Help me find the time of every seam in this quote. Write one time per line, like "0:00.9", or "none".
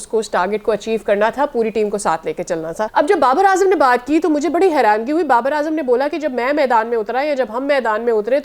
0:02.9